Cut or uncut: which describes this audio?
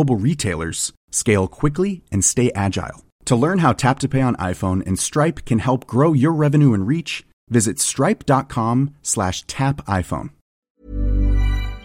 cut